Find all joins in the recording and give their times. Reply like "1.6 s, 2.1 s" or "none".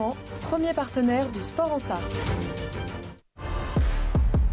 3.6 s